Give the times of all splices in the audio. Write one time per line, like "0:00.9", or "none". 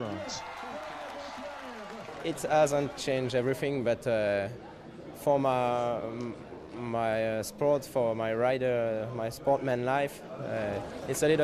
0:02.1

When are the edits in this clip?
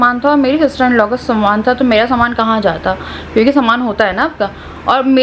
none

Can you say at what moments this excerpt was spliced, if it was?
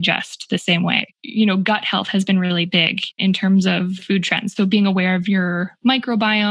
0:01.2
0:03.2
0:04.0

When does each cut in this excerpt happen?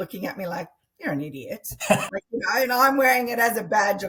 none

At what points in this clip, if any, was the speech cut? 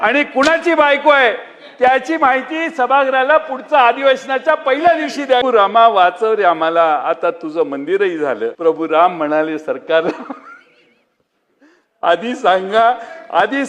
0:05.4
0:08.5

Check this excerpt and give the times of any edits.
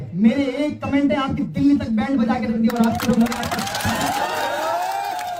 none

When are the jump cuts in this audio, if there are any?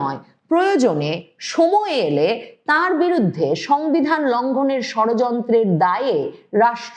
none

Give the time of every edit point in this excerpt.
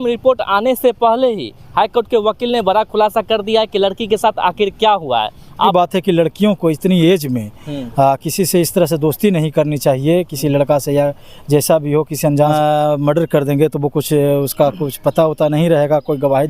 0:05.7
0:12.5

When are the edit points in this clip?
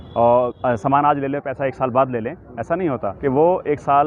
0:03.1

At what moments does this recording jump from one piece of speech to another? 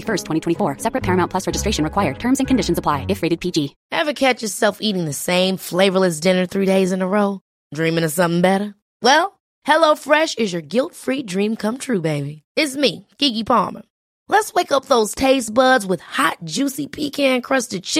0:03.8

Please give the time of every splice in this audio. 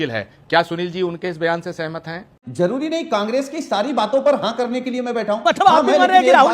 0:02.4

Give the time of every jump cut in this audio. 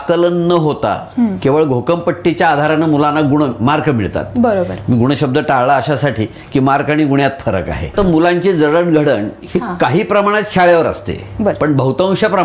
0:07.9

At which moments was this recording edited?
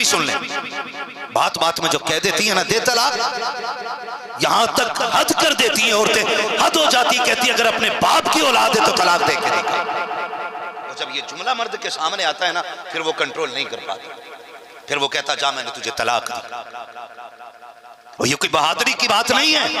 none

